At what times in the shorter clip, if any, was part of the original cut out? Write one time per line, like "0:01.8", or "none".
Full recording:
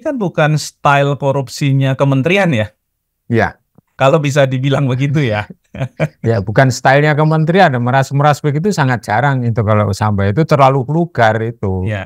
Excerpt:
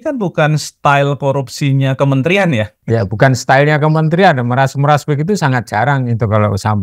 0:02.8